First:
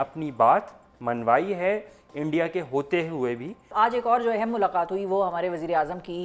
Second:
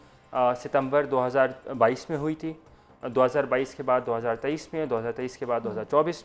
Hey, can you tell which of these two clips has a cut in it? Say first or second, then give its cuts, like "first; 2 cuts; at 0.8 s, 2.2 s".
first; 1 cut; at 3.7 s